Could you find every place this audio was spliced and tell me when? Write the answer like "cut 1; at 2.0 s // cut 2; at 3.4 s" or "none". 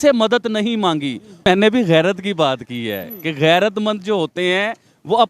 cut 1; at 1.5 s

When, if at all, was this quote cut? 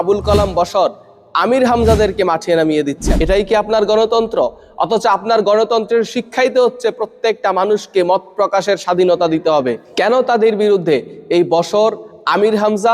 cut 1; at 3.1 s

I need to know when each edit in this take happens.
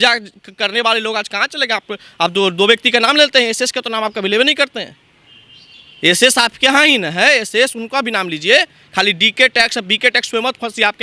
none

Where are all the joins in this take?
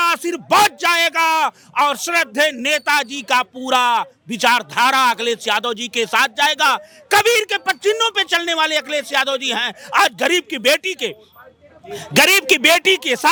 none

